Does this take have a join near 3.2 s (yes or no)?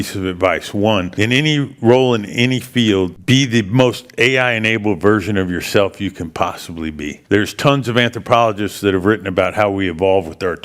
yes